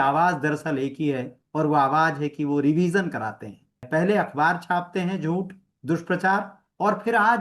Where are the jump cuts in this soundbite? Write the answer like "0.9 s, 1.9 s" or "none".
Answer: 3.8 s